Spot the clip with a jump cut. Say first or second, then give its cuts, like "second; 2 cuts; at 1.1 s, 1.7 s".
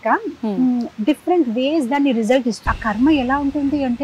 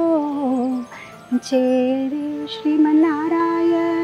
first; 1 cut; at 2.7 s